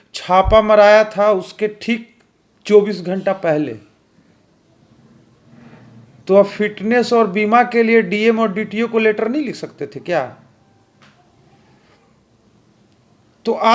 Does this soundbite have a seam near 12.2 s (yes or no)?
yes